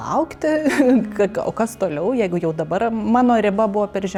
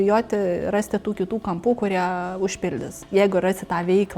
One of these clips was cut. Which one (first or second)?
second